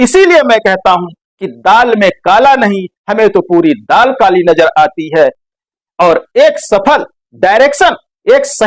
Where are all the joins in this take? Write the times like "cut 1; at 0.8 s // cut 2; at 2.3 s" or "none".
cut 1; at 5.4 s